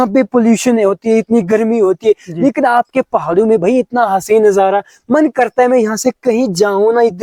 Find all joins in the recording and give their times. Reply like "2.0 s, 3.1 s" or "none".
none